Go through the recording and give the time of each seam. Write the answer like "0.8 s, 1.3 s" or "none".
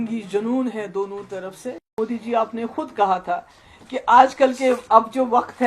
1.9 s